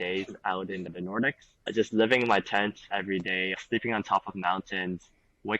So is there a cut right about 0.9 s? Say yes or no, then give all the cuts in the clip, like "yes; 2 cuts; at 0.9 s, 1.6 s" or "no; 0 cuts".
no; 1 cut; at 3.5 s